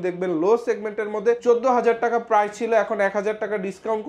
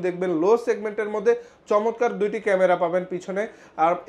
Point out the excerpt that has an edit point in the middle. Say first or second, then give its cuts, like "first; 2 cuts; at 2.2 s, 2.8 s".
first; 1 cut; at 1.4 s